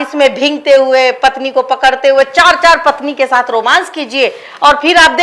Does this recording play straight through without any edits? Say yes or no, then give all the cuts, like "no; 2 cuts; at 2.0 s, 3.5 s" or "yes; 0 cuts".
yes; 0 cuts